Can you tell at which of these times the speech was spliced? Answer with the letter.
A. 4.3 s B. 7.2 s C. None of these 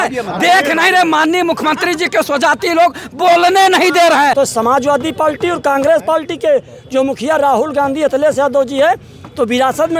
A